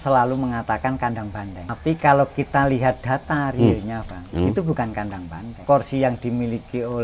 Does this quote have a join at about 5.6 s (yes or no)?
yes